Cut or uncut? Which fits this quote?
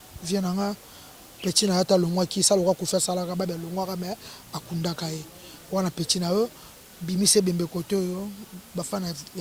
uncut